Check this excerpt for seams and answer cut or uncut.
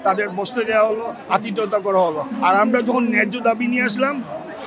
uncut